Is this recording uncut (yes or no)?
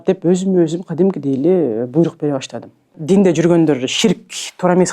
no